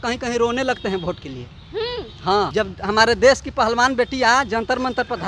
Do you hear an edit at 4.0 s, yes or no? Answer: no